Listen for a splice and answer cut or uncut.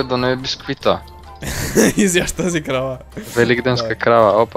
uncut